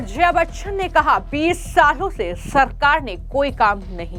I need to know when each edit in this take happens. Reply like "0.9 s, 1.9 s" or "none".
none